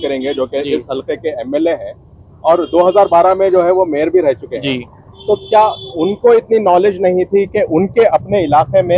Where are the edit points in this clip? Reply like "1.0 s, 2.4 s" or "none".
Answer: none